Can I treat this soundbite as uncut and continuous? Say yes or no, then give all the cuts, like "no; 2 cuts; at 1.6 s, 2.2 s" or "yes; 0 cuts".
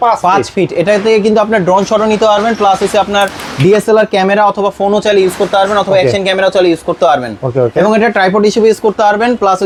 yes; 0 cuts